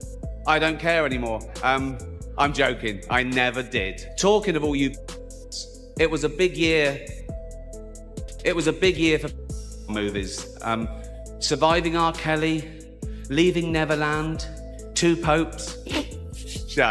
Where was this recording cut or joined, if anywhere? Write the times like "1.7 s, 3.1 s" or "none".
4.0 s